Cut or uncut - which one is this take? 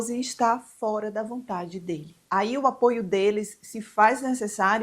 cut